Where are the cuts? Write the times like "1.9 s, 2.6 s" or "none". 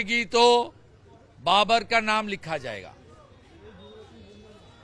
none